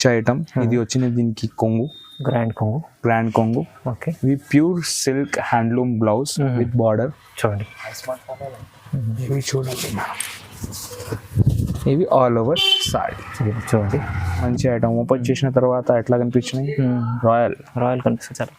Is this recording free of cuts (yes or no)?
no